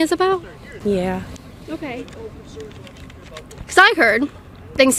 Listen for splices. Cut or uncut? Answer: uncut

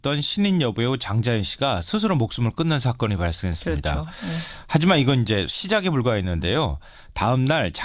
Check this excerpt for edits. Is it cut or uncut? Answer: cut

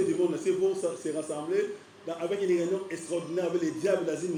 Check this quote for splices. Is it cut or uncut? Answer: uncut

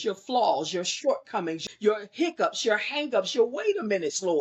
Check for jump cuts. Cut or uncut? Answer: cut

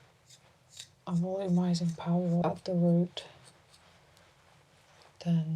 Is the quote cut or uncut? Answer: cut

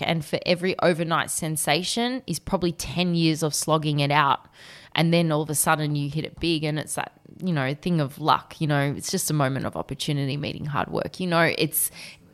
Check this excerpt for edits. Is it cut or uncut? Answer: uncut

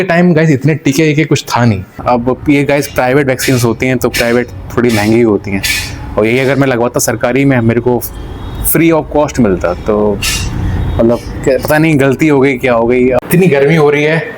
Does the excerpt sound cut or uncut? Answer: cut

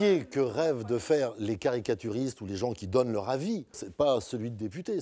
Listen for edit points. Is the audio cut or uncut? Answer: cut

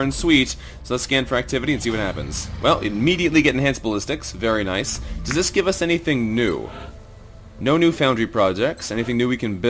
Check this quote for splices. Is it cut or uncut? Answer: cut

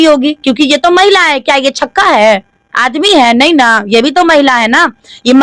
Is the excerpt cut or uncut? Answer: uncut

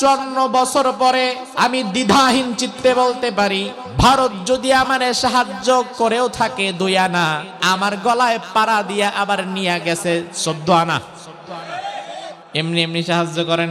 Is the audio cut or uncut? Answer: cut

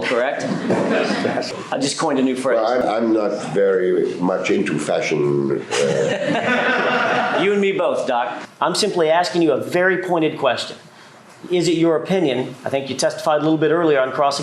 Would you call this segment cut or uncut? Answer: cut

